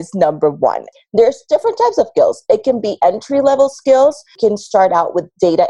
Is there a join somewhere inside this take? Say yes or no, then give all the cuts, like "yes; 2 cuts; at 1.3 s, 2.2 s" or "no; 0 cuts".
yes; 2 cuts; at 0.9 s, 4.3 s